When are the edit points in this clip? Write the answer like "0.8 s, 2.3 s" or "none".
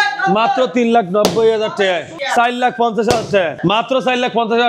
2.1 s, 3.5 s